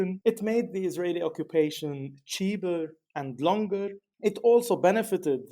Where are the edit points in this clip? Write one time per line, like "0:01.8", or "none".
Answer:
0:04.0

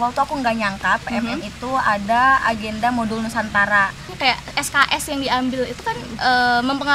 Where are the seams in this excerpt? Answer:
0:04.1

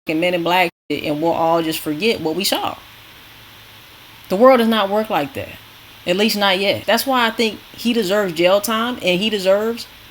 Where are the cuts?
0:06.8

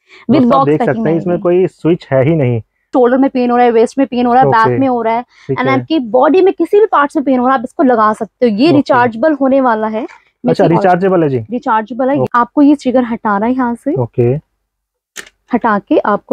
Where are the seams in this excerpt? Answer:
0:02.9
0:12.3

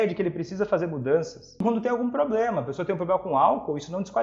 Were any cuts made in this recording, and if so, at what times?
0:01.6

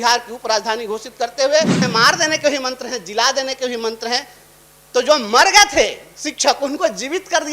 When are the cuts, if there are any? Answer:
0:01.8

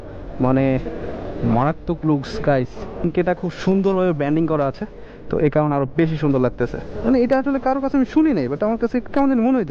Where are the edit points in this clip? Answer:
0:03.0
0:06.9

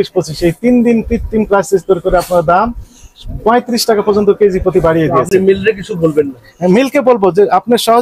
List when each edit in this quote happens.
none

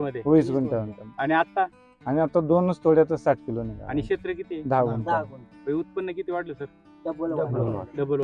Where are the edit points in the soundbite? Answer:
none

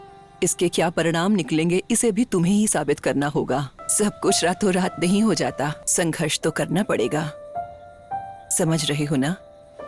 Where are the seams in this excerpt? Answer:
0:03.8
0:05.8

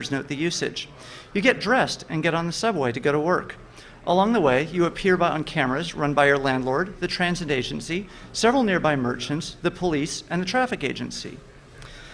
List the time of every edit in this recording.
none

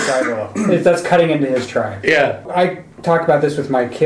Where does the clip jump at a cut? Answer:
0:02.4

